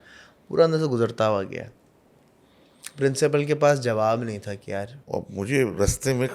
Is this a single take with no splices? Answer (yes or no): no